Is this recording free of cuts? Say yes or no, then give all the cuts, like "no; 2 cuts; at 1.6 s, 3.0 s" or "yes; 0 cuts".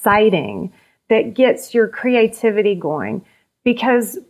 yes; 0 cuts